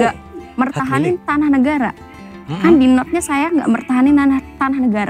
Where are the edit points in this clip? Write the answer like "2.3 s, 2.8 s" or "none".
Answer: none